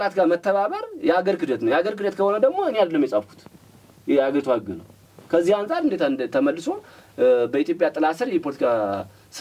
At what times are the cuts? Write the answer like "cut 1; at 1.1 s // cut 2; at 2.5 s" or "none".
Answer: none

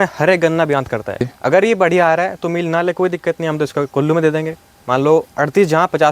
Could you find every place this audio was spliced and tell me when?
cut 1; at 1.3 s

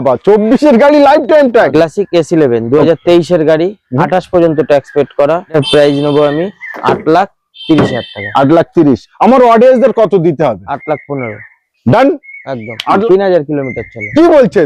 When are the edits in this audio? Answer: cut 1; at 1.7 s // cut 2; at 5.5 s // cut 3; at 13.0 s

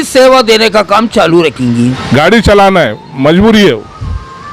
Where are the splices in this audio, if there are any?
cut 1; at 2.0 s

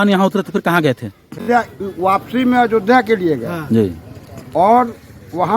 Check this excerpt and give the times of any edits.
cut 1; at 1.4 s

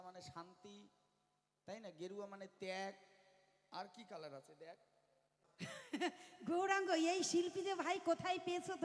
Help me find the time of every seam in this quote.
cut 1; at 5.4 s

